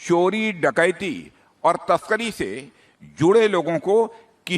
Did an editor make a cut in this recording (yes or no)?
no